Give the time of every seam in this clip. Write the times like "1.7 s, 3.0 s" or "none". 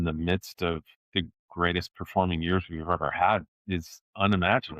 0.9 s, 3.8 s